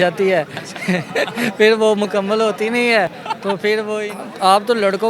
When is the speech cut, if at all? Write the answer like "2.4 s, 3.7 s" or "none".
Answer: 4.0 s